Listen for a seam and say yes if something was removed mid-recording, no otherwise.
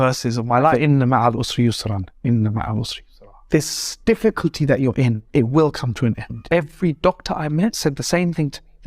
yes